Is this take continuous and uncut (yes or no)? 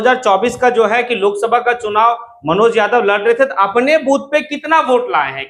yes